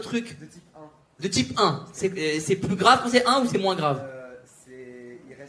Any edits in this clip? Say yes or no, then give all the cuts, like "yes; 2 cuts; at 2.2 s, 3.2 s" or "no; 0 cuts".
no; 0 cuts